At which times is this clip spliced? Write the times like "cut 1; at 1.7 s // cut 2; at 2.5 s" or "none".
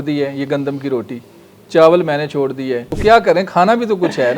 cut 1; at 2.9 s